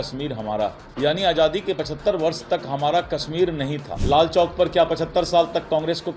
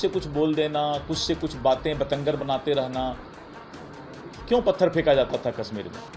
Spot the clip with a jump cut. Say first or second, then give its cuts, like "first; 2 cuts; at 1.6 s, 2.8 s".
first; 2 cuts; at 0.8 s, 3.9 s